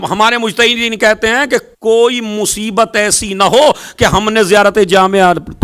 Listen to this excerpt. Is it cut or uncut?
uncut